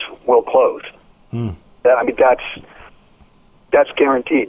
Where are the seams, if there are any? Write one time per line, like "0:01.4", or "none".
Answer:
none